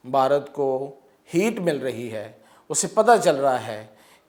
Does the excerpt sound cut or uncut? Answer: uncut